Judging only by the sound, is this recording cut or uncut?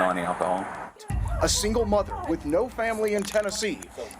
cut